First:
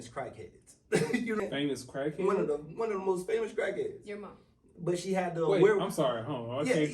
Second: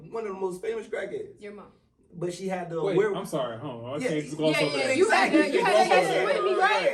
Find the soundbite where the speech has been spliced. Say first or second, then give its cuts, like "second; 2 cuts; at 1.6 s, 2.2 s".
first; 1 cut; at 1.4 s